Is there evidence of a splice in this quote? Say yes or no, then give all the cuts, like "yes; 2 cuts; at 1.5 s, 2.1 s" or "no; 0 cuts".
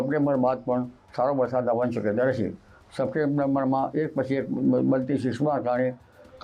no; 0 cuts